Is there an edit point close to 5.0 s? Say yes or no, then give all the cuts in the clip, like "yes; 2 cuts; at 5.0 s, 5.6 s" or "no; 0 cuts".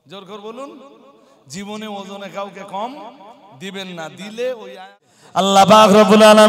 yes; 1 cut; at 5.0 s